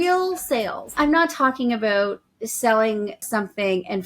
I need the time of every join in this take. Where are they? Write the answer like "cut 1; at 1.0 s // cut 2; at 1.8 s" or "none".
cut 1; at 0.9 s // cut 2; at 3.2 s